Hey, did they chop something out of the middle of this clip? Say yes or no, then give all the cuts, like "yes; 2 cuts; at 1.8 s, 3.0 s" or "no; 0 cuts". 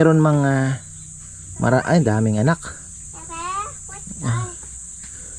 no; 0 cuts